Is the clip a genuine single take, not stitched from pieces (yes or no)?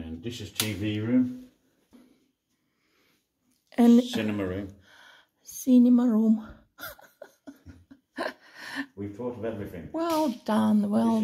no